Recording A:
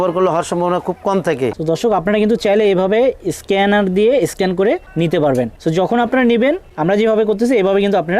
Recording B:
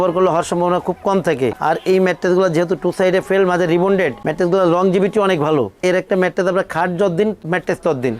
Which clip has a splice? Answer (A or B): A